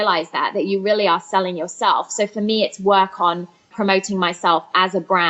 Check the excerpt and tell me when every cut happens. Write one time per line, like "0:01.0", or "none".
0:03.7